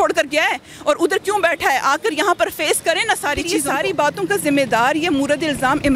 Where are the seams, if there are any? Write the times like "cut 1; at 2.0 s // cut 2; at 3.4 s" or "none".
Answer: cut 1; at 3.6 s